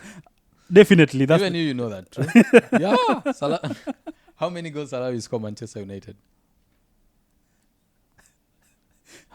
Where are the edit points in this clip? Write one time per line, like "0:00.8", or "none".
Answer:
none